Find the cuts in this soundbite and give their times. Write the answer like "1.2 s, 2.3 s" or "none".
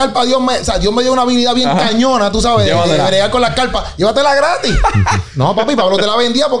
none